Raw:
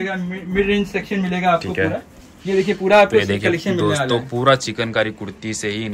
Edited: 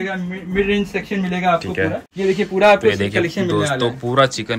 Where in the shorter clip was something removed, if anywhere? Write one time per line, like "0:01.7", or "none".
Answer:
0:02.1